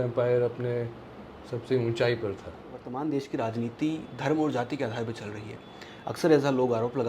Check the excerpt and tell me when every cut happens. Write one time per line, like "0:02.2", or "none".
0:02.9